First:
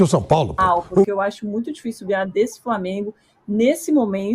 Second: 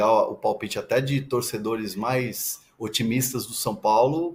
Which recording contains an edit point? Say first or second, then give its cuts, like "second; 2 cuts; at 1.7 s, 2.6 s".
first; 1 cut; at 1.1 s